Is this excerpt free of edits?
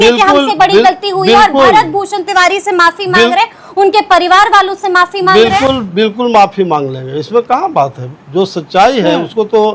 yes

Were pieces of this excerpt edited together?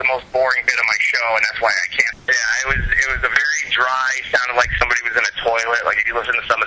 yes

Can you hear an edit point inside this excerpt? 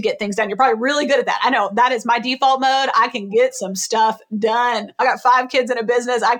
yes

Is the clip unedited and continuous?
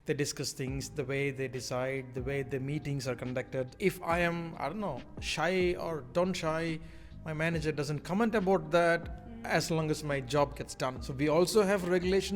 no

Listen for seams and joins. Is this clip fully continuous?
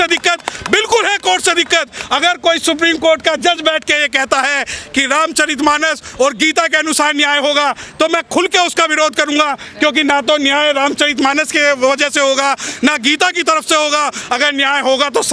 yes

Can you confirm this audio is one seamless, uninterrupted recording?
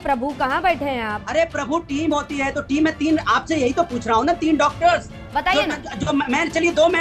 yes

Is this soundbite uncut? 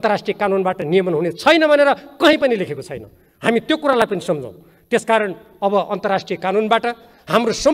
yes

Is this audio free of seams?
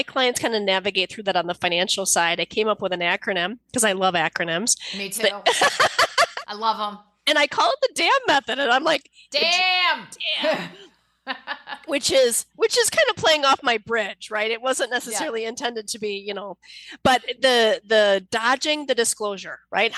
yes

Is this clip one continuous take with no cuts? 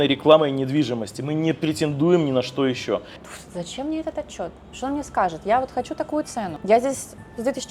no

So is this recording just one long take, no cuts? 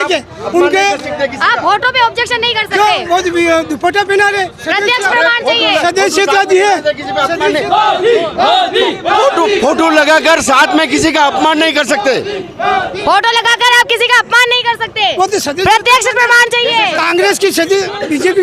yes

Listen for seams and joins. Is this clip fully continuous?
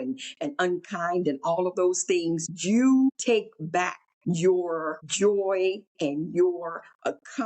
no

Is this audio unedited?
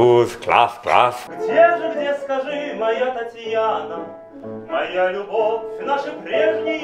no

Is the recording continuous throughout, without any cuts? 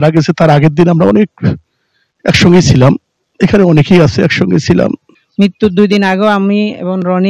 no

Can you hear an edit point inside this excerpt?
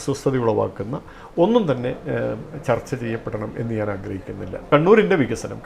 yes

